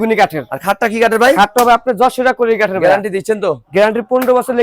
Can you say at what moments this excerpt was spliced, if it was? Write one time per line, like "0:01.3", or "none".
none